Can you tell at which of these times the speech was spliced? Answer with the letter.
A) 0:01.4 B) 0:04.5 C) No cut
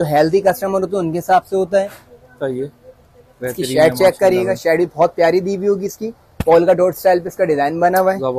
C